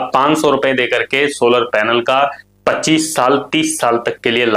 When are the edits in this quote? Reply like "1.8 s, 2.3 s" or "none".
none